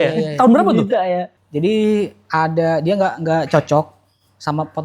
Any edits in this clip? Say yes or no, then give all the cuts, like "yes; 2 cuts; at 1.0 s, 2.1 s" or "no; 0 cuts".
yes; 1 cut; at 1.3 s